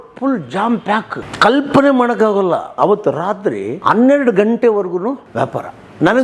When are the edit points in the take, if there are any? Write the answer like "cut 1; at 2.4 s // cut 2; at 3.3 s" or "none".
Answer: cut 1; at 1.2 s // cut 2; at 2.7 s // cut 3; at 3.7 s // cut 4; at 5.2 s